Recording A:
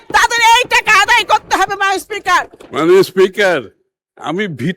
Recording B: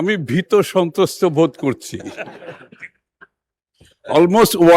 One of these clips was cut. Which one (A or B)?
A